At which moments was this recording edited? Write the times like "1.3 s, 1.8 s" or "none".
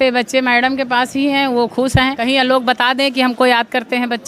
2.2 s